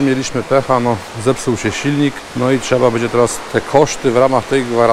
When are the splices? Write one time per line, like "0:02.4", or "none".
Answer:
0:02.2
0:03.4